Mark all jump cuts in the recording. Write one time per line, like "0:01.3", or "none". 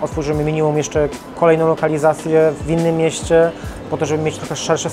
none